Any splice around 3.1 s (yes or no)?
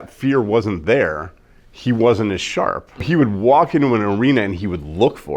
yes